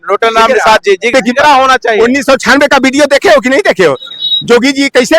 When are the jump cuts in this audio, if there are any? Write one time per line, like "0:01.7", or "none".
0:01.1